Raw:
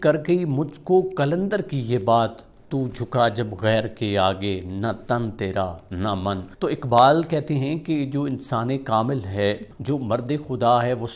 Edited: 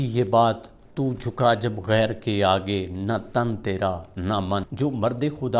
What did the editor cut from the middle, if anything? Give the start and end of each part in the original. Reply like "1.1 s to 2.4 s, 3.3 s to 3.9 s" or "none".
6.4 s to 9.8 s